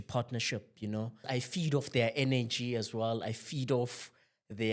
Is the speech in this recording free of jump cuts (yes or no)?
no